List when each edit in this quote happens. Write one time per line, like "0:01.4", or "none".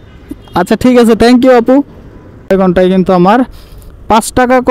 0:02.5